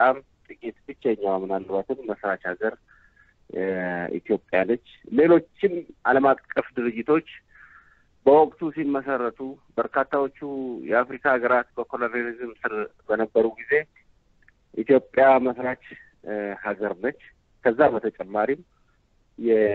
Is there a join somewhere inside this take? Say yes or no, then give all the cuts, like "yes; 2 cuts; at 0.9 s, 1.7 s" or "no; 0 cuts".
yes; 1 cut; at 18.2 s